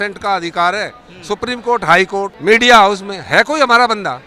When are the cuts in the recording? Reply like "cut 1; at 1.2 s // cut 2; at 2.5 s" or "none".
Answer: cut 1; at 2.3 s